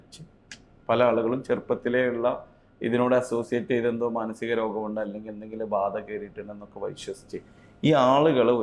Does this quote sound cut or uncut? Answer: uncut